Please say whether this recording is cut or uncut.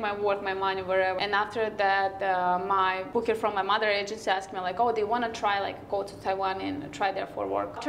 cut